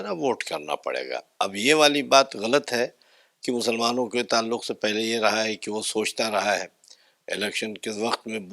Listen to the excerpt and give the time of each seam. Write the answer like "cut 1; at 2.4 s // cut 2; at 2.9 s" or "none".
none